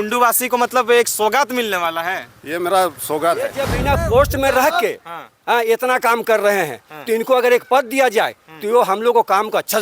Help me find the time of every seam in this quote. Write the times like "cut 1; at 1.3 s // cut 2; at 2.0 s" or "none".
cut 1; at 3.7 s